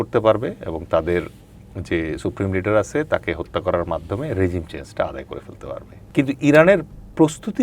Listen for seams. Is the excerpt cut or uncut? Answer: cut